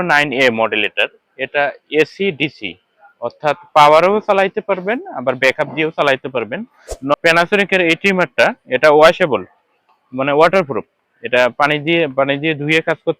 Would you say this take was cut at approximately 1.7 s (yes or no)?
no